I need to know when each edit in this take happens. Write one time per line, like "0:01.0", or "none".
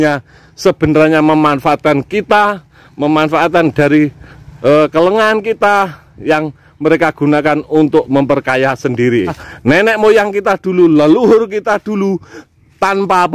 0:09.5